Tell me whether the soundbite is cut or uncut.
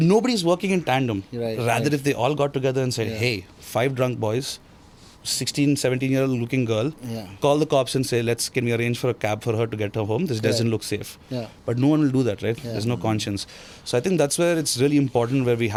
uncut